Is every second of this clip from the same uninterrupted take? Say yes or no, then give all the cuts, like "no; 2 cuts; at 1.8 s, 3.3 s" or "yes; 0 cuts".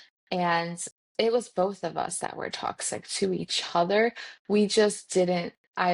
yes; 0 cuts